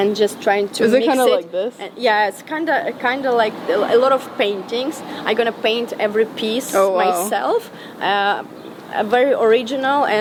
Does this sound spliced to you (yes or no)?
no